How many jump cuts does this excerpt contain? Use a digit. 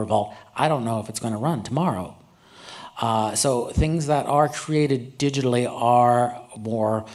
0